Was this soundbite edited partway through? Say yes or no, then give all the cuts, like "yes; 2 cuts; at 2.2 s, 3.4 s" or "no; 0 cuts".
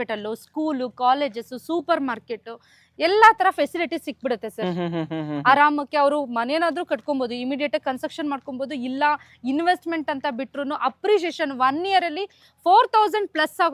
no; 0 cuts